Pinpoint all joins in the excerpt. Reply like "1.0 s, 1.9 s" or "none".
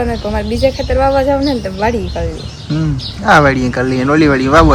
none